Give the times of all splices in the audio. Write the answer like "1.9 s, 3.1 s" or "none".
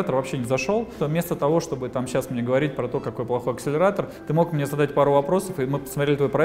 0.9 s